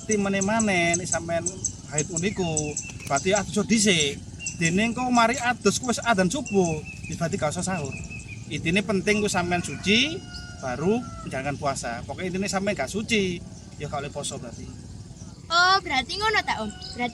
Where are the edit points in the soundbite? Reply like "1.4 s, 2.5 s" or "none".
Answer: 15.3 s

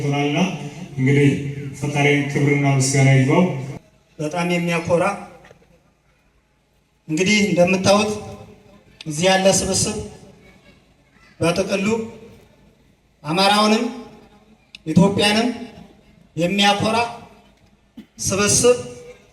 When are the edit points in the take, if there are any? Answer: 3.7 s

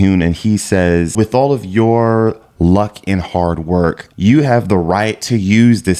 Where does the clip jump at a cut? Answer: 1.1 s, 4.1 s

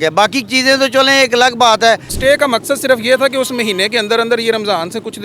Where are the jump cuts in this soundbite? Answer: 2.1 s

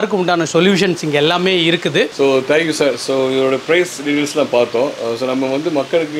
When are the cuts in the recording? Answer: none

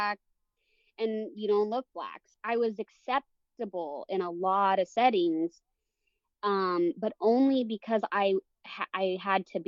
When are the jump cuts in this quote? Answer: 2.3 s

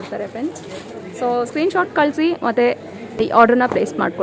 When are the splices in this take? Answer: 3.2 s

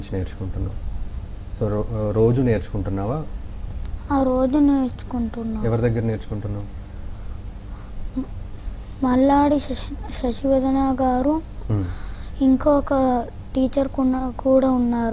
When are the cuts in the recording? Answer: 9.2 s

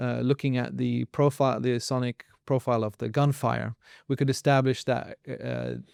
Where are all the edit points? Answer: none

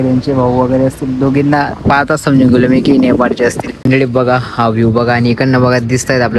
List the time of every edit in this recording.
3.7 s

